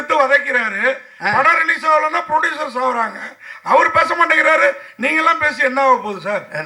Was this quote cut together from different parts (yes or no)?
no